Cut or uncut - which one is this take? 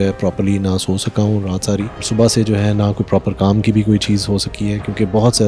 cut